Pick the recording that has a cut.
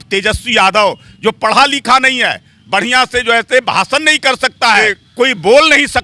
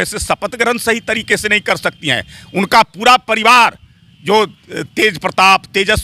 first; 1 cut; at 5.0 s

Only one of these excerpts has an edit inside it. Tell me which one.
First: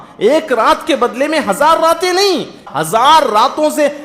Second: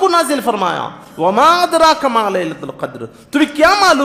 first; 1 cut; at 2.6 s

